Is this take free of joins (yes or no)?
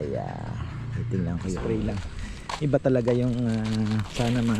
no